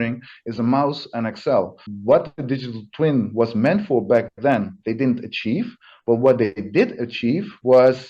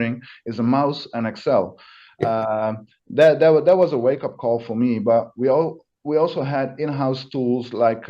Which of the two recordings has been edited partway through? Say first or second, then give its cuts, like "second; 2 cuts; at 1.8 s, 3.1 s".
first; 1 cut; at 1.9 s